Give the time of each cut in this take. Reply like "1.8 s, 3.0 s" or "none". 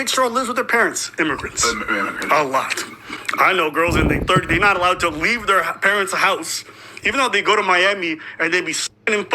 4.4 s